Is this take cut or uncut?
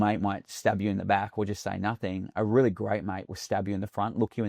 uncut